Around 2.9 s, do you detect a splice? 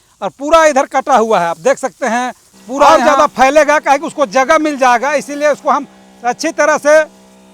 yes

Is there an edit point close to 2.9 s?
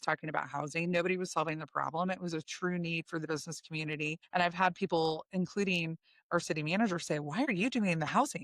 no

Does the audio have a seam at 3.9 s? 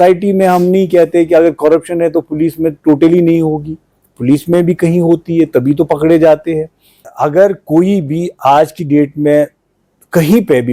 no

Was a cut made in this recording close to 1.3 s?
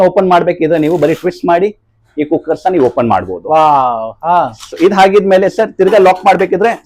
no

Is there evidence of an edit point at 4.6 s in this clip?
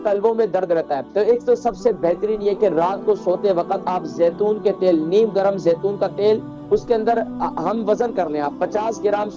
no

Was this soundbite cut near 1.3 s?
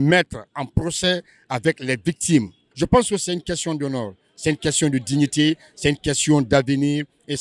no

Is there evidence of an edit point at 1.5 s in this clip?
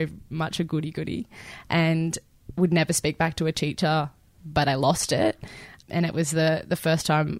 no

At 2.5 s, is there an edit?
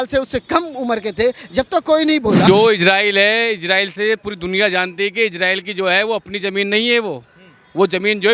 yes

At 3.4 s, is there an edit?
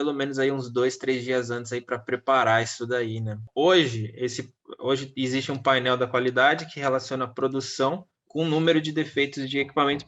yes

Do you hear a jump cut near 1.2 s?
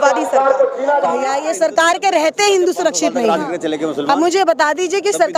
yes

